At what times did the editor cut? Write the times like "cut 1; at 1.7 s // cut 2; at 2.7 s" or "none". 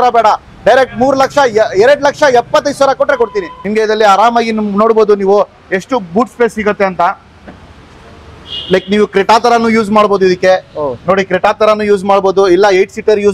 cut 1; at 3.5 s